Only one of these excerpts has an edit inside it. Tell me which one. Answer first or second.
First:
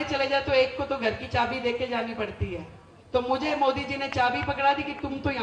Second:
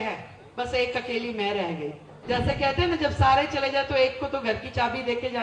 second